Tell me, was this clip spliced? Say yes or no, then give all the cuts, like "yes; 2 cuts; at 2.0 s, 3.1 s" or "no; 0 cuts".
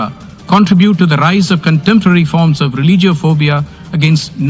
no; 0 cuts